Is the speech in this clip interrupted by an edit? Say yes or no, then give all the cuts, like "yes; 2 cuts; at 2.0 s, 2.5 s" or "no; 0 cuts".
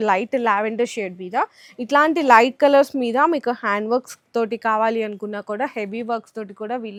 no; 0 cuts